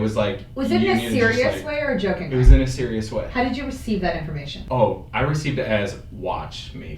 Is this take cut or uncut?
cut